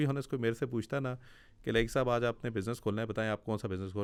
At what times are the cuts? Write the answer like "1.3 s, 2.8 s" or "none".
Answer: none